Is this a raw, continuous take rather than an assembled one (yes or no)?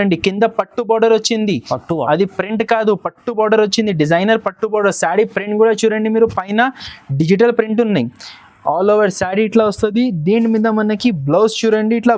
yes